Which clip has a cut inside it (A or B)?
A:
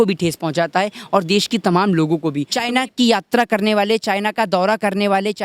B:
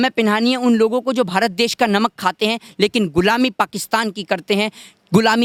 A